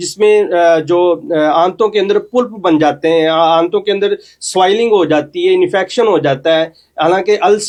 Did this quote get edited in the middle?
no; 0 cuts

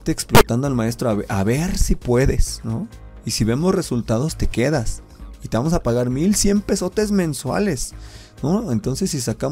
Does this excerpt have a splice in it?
no; 0 cuts

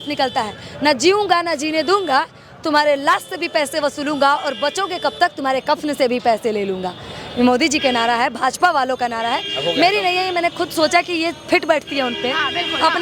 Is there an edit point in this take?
no; 0 cuts

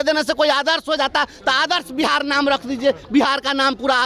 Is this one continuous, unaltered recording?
yes; 0 cuts

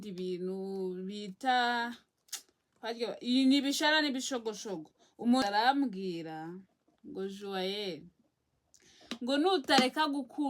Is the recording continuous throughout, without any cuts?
no; 1 cut; at 5.4 s

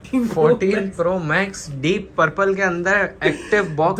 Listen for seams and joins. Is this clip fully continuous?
yes; 0 cuts

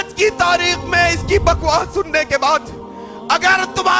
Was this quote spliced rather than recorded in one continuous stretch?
no; 0 cuts

